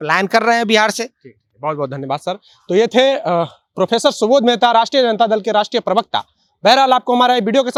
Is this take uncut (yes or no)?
yes